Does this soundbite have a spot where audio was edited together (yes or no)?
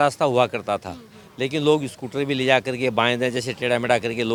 no